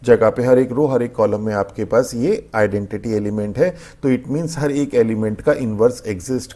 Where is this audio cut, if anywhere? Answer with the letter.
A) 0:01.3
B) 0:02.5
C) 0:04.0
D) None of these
D